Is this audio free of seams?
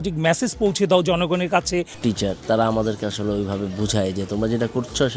no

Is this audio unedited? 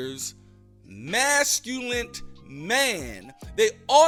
yes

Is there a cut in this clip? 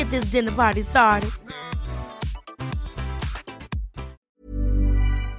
yes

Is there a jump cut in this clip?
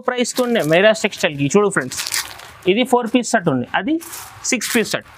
no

